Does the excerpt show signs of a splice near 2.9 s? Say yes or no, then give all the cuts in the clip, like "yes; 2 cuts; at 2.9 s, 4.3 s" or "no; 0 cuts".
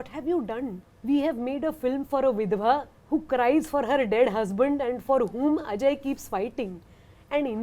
yes; 2 cuts; at 0.9 s, 2.9 s